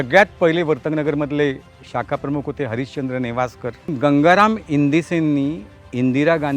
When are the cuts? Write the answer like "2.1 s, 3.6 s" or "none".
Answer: 3.9 s